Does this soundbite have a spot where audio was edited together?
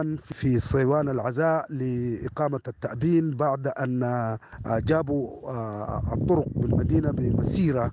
no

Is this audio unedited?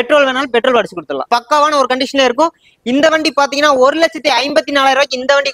no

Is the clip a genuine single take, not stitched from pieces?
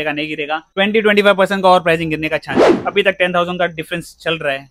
no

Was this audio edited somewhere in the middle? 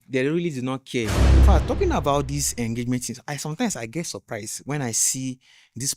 yes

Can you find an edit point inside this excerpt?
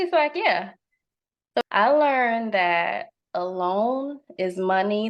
yes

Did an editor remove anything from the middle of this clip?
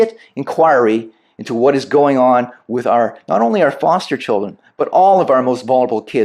no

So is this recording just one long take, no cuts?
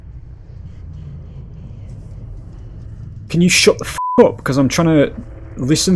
no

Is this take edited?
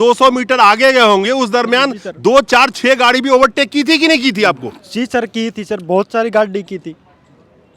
no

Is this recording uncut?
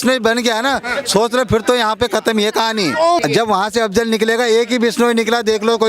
no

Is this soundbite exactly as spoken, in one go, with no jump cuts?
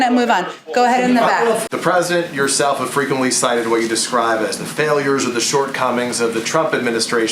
no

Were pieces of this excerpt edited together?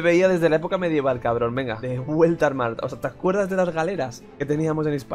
no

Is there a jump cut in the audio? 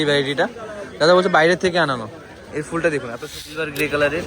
yes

